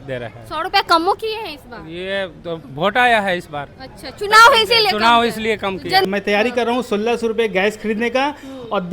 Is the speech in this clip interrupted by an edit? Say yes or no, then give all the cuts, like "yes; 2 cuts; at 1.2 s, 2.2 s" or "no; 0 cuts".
yes; 1 cut; at 6.0 s